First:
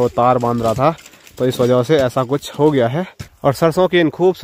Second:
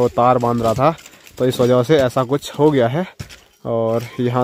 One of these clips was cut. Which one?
first; 1 cut; at 3.2 s

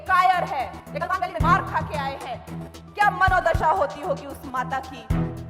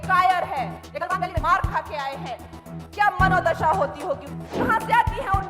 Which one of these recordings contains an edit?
second; 1 cut; at 4.4 s

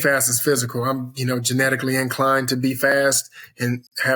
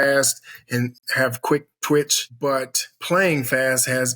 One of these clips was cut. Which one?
second; 1 cut; at 2.2 s

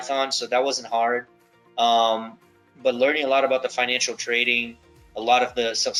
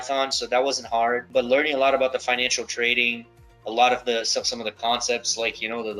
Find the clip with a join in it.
second; 1 cut; at 1.2 s

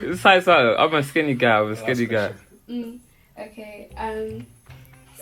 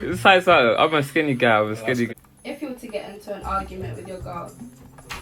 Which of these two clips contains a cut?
second; 1 cut; at 2.1 s

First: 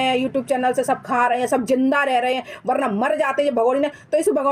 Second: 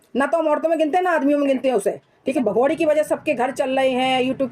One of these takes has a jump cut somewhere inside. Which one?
second; 1 cut; at 2.3 s

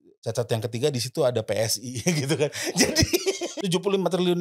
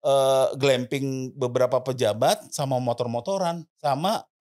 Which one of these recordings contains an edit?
first; 1 cut; at 3.5 s

